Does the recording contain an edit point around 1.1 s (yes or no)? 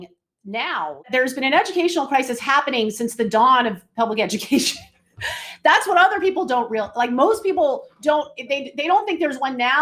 yes